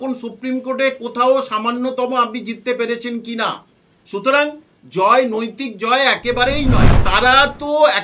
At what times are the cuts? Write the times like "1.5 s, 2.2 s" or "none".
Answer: 7.0 s

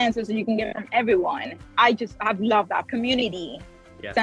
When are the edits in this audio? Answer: 1.6 s, 2.8 s

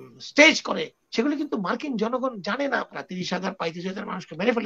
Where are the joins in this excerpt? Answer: 2.9 s

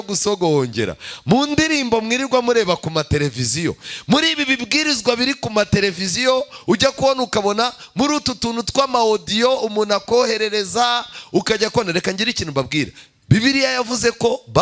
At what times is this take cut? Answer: none

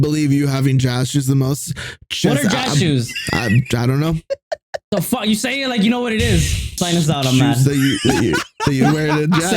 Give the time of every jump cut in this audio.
6.7 s

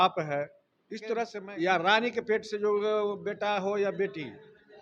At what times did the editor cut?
1.4 s

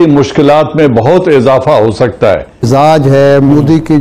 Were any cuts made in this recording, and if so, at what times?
2.7 s

